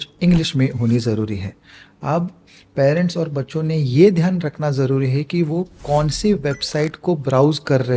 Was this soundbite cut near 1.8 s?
no; 0 cuts

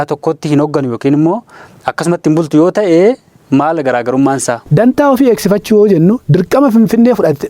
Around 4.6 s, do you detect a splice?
yes; 1 cut; at 4.6 s

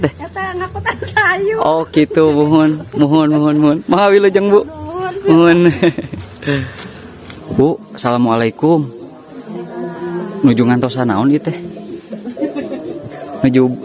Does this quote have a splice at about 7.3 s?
yes; 1 cut; at 7.3 s

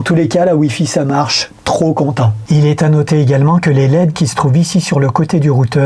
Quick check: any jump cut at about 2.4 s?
no; 0 cuts

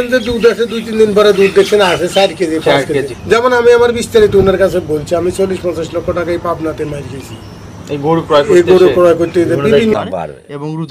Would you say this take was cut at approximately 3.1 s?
yes; 2 cuts; at 3.1 s, 9.9 s

